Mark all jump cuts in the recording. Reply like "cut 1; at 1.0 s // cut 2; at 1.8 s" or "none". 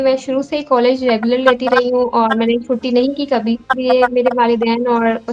cut 1; at 3.8 s